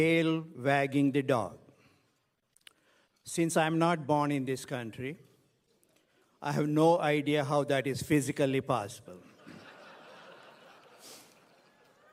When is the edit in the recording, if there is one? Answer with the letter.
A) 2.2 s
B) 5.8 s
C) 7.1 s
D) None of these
C